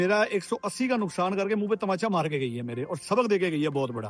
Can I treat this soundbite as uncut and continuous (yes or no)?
yes